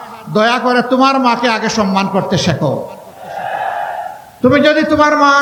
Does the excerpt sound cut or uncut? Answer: uncut